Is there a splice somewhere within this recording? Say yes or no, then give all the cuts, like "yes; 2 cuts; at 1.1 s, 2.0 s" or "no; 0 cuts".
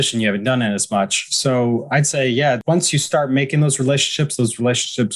yes; 1 cut; at 2.6 s